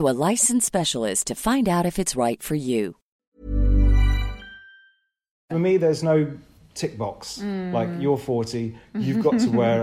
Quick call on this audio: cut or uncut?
cut